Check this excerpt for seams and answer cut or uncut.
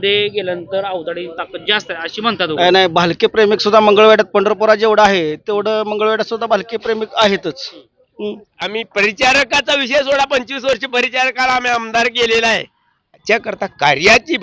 cut